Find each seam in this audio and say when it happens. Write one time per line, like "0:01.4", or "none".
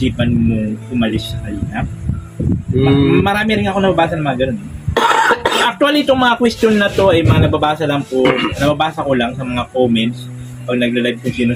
none